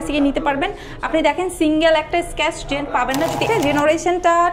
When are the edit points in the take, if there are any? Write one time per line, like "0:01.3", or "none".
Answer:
0:03.4